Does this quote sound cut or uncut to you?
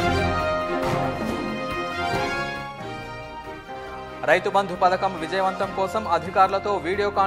cut